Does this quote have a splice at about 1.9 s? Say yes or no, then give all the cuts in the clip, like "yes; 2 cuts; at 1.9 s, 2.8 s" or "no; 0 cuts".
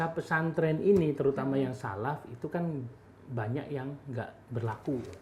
no; 0 cuts